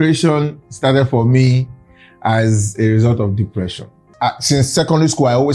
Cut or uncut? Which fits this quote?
cut